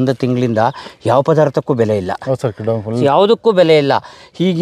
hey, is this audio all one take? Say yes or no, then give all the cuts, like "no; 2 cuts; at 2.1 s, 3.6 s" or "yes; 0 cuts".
no; 1 cut; at 3.0 s